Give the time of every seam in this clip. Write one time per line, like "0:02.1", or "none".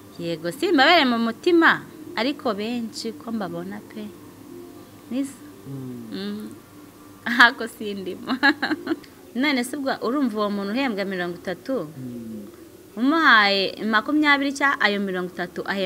0:09.1